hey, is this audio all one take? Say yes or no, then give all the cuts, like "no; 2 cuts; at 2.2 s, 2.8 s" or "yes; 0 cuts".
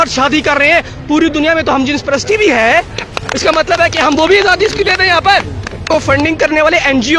no; 1 cut; at 5.9 s